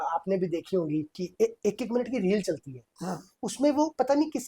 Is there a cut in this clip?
yes; 1 cut; at 1.2 s

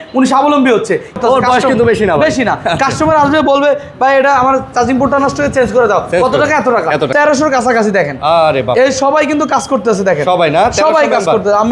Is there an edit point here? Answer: yes; 2 cuts; at 1.2 s, 7.1 s

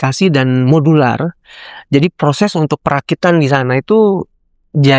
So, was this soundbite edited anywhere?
no; 0 cuts

